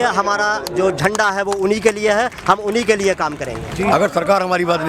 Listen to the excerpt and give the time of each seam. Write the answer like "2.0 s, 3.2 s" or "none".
3.6 s